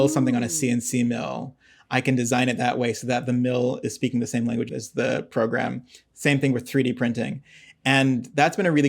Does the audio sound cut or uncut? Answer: cut